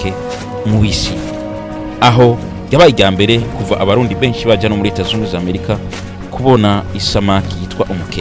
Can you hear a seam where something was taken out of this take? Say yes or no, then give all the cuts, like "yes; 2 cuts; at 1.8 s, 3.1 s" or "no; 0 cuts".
no; 0 cuts